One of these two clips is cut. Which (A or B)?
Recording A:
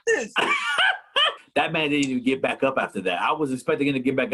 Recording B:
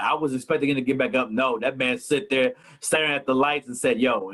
A